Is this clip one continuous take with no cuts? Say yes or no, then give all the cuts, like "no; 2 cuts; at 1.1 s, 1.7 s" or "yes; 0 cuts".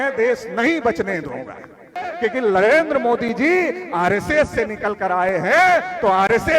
no; 1 cut; at 2.1 s